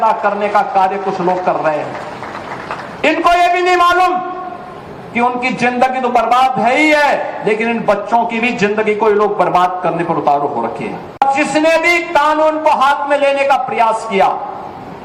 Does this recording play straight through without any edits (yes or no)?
yes